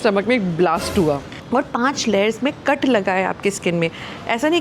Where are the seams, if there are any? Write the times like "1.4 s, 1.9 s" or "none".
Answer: 1.4 s